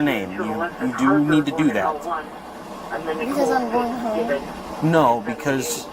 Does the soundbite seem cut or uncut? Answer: uncut